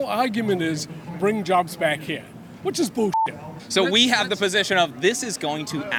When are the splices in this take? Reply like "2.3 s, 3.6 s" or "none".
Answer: none